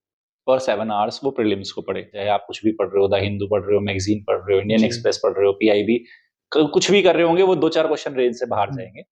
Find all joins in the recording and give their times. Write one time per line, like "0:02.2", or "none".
0:02.2